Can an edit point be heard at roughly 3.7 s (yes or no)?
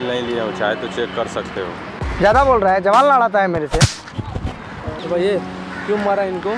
no